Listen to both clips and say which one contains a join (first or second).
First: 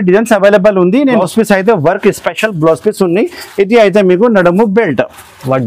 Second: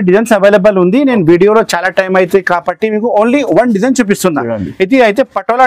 first